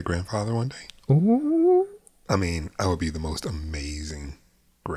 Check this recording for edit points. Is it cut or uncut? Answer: cut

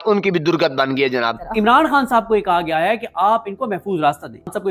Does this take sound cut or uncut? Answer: cut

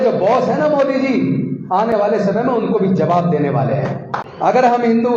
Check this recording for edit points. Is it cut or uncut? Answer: cut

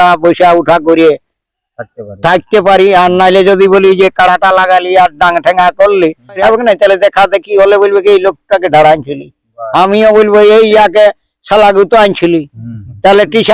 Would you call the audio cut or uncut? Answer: cut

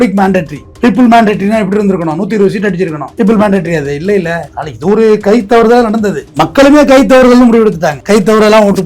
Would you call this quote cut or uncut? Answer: cut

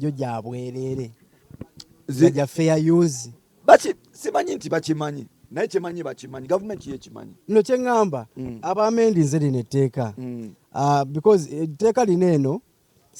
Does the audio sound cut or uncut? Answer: uncut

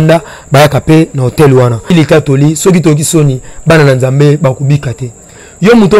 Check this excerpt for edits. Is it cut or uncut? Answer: cut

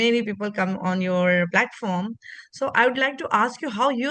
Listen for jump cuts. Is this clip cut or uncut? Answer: uncut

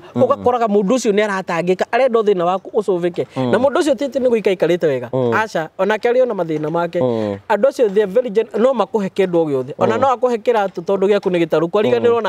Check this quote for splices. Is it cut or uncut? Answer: uncut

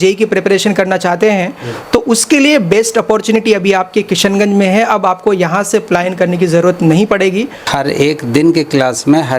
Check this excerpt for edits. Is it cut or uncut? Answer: cut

